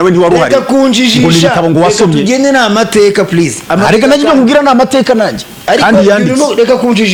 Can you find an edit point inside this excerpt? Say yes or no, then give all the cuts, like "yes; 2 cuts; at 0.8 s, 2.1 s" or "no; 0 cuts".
no; 0 cuts